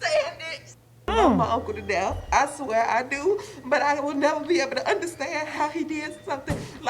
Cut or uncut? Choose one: cut